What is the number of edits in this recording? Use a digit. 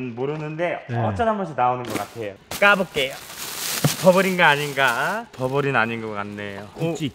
1